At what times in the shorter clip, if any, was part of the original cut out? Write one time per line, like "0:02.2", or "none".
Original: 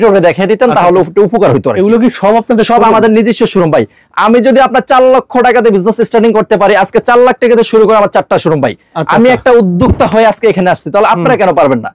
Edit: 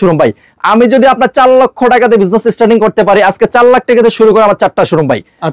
none